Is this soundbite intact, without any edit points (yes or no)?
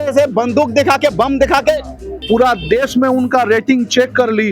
no